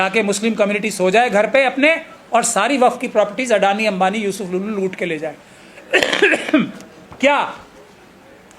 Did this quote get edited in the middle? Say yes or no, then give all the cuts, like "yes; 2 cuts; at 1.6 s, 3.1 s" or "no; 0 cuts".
no; 0 cuts